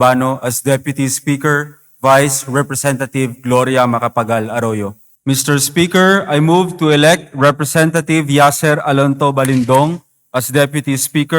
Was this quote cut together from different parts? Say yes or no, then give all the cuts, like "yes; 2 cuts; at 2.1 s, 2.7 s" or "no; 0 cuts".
yes; 1 cut; at 5.1 s